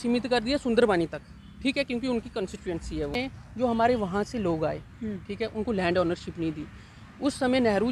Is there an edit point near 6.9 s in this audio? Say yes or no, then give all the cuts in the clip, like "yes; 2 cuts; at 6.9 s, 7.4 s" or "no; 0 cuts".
no; 1 cut; at 3.2 s